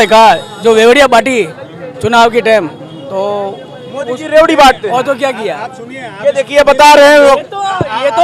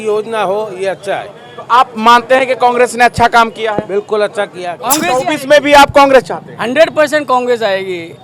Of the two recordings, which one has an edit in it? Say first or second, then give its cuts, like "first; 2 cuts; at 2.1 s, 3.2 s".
second; 1 cut; at 4.8 s